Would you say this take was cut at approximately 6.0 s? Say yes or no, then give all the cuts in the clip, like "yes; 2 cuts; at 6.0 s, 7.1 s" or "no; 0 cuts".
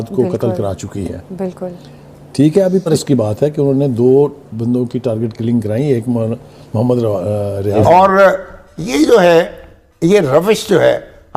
no; 2 cuts; at 2.9 s, 7.8 s